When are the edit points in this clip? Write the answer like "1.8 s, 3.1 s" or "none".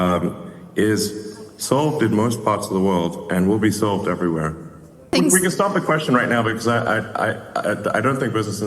5.1 s